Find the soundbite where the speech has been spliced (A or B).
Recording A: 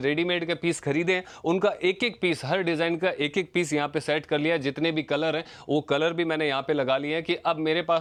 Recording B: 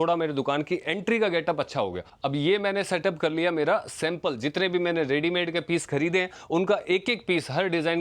B